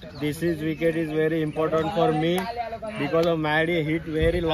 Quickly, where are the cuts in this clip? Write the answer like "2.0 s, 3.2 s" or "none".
none

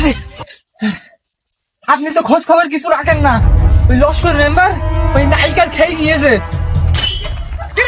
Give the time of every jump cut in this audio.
none

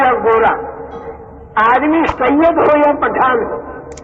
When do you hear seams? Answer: 2.1 s

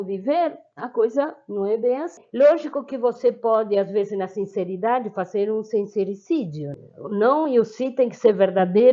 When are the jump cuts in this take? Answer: 2.2 s, 6.7 s

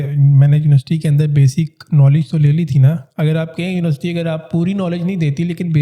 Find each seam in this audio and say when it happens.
none

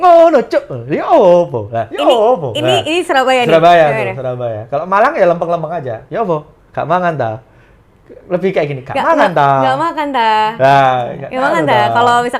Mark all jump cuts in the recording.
none

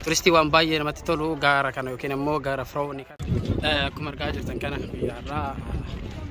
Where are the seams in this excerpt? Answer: 3.0 s

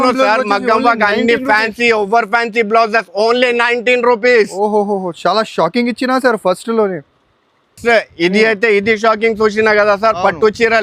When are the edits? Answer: none

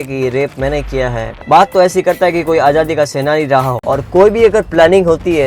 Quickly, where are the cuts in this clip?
1.4 s, 3.8 s

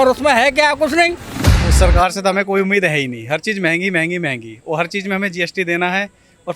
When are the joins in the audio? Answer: 1.6 s

